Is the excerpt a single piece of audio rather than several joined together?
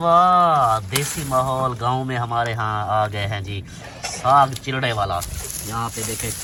yes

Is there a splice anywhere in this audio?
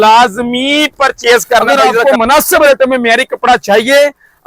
yes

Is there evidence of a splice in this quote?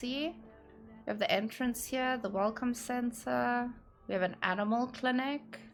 no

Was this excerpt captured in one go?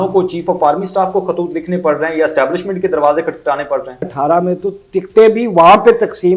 no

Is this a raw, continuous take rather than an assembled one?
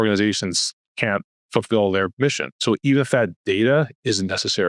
no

